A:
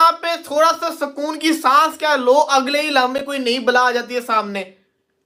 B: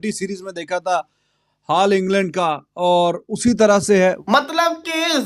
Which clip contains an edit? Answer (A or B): B